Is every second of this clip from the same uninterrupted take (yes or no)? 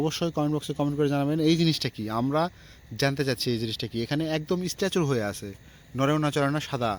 yes